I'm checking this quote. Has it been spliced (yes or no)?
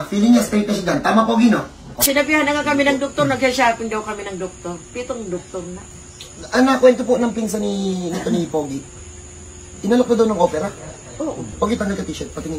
yes